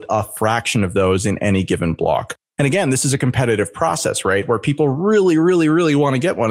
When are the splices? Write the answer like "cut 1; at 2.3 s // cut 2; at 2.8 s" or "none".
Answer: none